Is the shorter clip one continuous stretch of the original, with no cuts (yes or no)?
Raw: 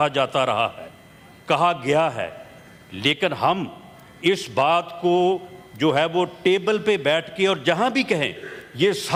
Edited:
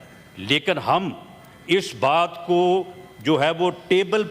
yes